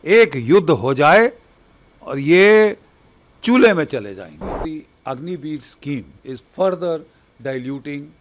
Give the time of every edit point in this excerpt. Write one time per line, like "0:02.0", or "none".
0:04.6
0:06.1